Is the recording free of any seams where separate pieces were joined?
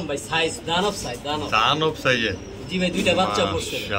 yes; 0 cuts

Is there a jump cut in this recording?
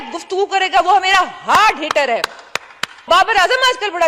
yes; 1 cut; at 3.1 s

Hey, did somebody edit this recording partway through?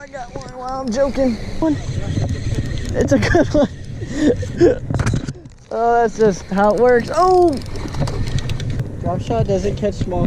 yes; 2 cuts; at 1.6 s, 8.8 s

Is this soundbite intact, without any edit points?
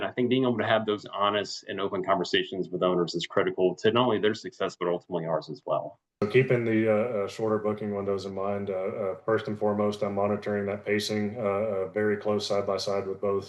no; 1 cut; at 6.2 s

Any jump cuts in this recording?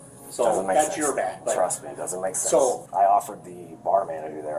yes; 1 cut; at 2.8 s

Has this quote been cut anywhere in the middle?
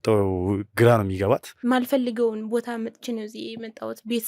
yes; 1 cut; at 1.5 s

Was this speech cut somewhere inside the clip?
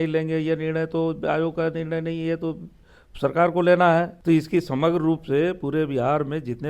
yes; 1 cut; at 4.1 s

